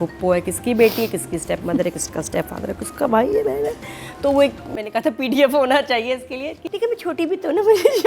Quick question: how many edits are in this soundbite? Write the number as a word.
one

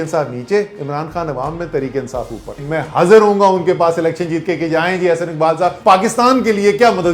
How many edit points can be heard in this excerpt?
two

